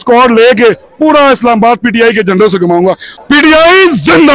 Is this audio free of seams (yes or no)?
no